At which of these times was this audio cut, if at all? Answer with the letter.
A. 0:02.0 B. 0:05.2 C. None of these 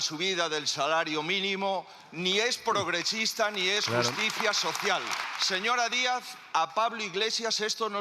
B